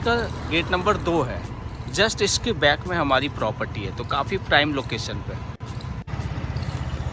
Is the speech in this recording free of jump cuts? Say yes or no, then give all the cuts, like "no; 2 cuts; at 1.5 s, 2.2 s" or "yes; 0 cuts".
yes; 0 cuts